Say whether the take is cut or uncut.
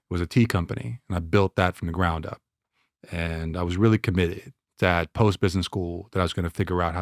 uncut